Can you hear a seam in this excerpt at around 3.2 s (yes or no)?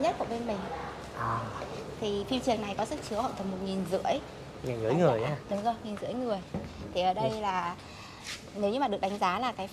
no